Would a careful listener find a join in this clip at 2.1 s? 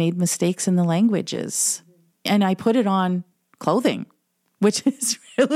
yes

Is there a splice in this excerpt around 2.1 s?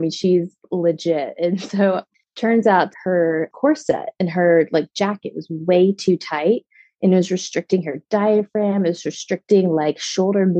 yes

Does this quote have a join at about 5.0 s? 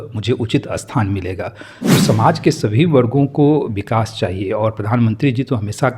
no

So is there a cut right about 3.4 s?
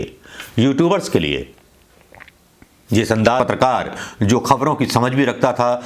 yes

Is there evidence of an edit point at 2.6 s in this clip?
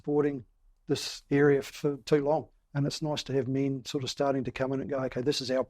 yes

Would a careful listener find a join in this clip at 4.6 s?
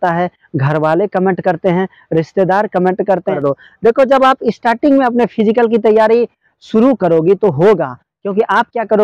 no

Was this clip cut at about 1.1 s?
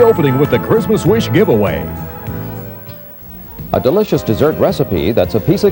no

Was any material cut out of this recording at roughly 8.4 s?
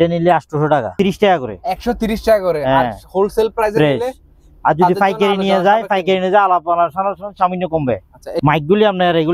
yes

